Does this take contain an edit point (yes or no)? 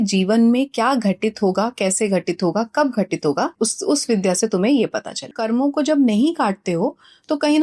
yes